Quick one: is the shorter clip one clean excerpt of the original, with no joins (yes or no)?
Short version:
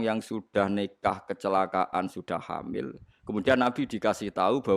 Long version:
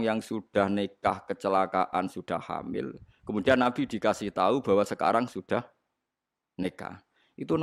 yes